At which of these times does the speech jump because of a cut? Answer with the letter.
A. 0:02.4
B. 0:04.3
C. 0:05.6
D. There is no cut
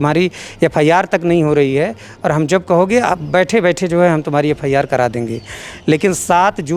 D